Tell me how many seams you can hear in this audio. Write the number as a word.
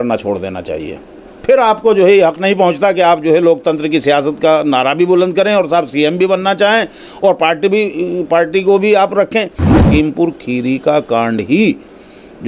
one